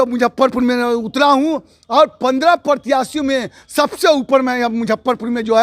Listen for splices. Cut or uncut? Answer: uncut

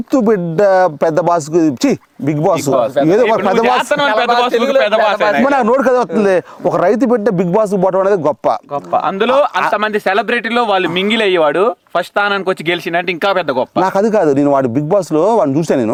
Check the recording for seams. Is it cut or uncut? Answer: uncut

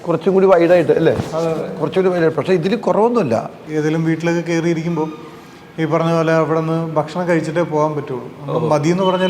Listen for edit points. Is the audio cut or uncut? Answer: cut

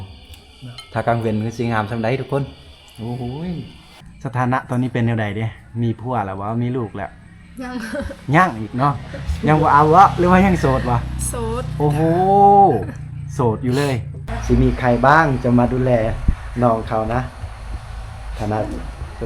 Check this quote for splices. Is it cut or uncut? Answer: cut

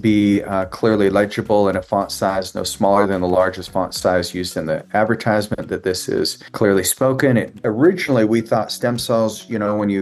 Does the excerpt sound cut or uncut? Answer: cut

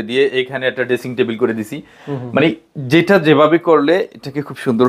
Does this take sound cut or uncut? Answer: uncut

